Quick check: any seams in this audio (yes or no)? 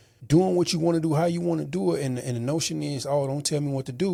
no